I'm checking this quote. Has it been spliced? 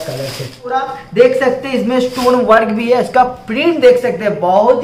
yes; 1 cut; at 0.9 s

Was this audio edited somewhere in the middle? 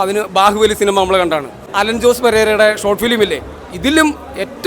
yes; 1 cut; at 1.6 s

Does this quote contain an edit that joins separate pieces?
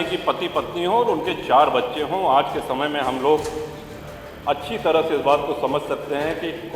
no; 0 cuts

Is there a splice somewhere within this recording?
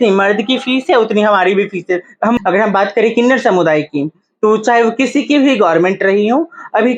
yes; 1 cut; at 2.4 s

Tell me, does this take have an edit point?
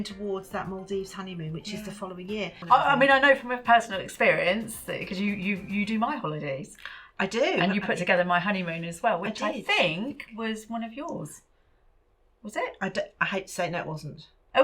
yes; 1 cut; at 2.6 s

